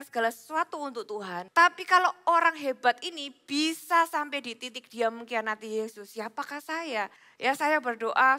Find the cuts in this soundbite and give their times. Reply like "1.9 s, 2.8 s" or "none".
1.3 s, 7.2 s